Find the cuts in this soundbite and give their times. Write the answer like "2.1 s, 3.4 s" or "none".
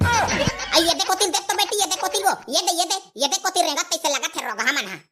none